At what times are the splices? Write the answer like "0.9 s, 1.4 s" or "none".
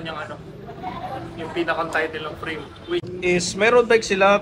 3.1 s